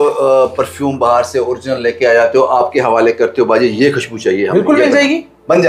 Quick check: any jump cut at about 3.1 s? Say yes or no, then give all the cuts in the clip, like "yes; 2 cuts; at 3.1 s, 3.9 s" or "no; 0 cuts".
no; 0 cuts